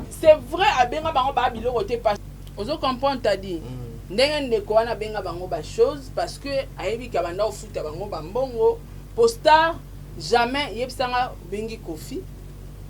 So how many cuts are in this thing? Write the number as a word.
zero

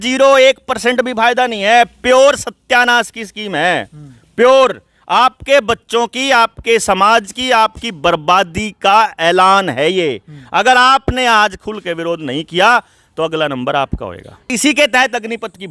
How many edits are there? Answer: one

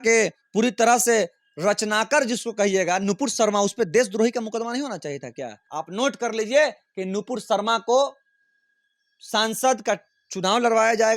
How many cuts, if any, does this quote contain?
one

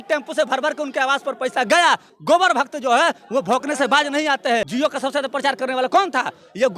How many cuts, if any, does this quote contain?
two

